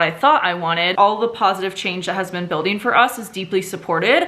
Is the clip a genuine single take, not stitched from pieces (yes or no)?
no